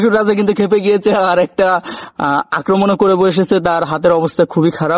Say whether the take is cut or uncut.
uncut